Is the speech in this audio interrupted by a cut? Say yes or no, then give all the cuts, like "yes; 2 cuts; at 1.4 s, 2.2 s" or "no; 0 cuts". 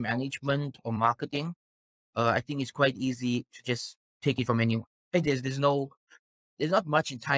no; 0 cuts